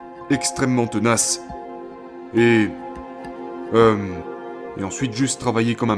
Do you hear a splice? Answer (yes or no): no